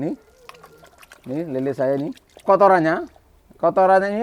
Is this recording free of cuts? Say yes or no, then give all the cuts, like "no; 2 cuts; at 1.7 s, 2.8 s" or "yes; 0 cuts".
no; 1 cut; at 2.3 s